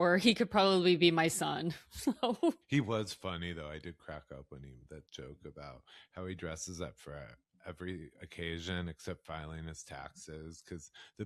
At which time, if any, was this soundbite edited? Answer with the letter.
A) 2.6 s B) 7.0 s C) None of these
A